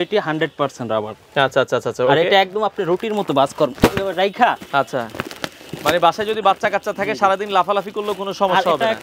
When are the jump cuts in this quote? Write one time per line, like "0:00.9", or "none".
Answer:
none